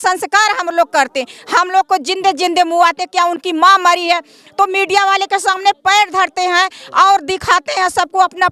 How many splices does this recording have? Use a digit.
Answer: 0